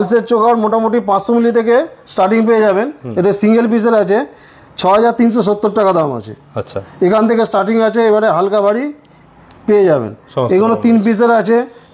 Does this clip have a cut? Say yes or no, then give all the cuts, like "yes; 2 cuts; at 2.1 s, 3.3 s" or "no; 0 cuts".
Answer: no; 0 cuts